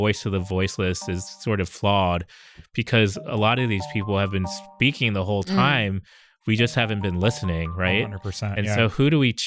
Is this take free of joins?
yes; 0 cuts

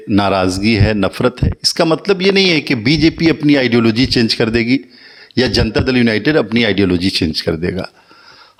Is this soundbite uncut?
yes; 0 cuts

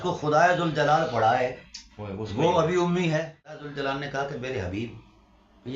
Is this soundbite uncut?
no; 1 cut; at 3.7 s

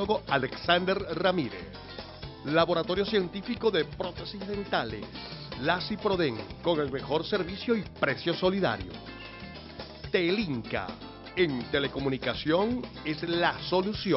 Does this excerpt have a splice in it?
no; 0 cuts

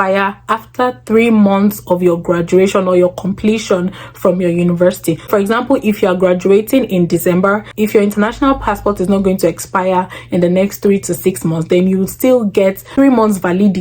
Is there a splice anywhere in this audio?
no; 0 cuts

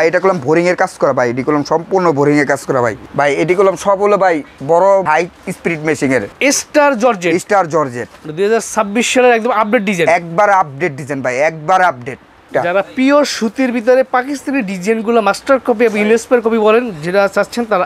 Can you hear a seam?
yes; 4 cuts; at 3.0 s, 5.1 s, 6.3 s, 12.4 s

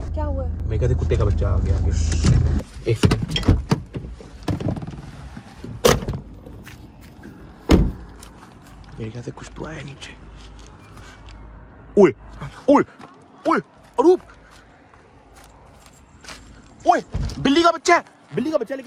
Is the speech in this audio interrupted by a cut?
no; 0 cuts

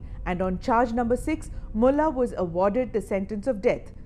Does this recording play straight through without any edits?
yes; 0 cuts

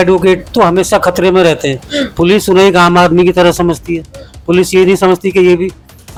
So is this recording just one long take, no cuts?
yes; 0 cuts

